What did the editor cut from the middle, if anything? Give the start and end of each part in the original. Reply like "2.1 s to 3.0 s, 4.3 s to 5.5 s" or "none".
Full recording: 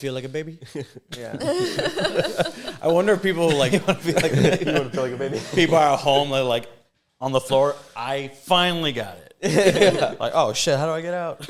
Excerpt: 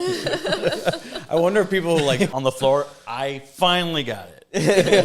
3.8 s to 7.2 s